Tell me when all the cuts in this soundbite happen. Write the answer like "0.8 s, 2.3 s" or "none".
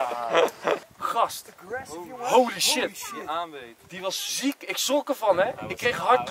1.0 s